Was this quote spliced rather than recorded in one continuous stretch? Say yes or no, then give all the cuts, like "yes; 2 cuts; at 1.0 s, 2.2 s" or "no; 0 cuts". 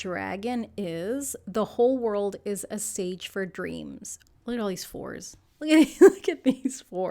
yes; 1 cut; at 4.1 s